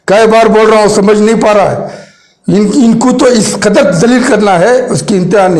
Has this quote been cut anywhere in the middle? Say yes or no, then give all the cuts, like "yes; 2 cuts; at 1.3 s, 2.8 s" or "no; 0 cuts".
no; 0 cuts